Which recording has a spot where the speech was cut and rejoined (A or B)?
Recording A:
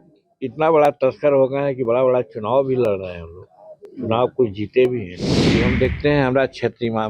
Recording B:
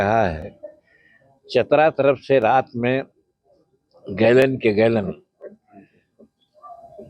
A